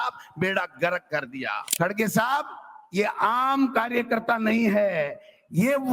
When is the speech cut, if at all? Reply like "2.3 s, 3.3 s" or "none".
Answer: 1.6 s